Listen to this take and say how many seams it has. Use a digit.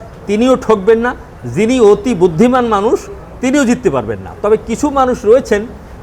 0